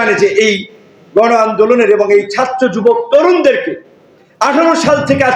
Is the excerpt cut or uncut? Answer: uncut